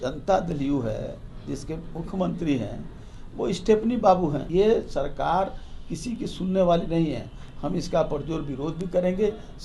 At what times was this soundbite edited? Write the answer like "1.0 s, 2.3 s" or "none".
4.4 s